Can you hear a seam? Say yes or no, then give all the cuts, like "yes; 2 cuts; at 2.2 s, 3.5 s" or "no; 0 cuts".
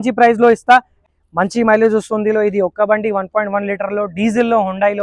yes; 1 cut; at 1.1 s